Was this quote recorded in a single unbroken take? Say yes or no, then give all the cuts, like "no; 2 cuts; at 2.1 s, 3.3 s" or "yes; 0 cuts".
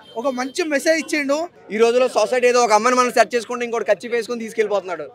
no; 1 cut; at 1.6 s